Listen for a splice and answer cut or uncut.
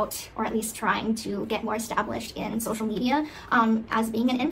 uncut